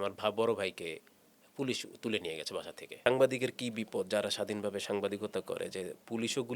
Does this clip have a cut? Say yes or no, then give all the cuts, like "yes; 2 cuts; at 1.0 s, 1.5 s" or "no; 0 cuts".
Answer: yes; 1 cut; at 3.0 s